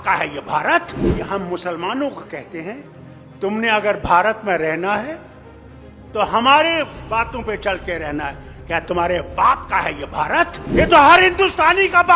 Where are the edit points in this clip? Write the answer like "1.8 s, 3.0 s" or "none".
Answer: 1.3 s, 10.8 s